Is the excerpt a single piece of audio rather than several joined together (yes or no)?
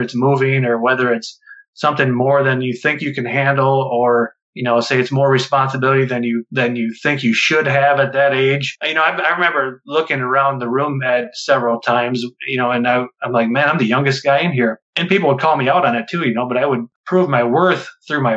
no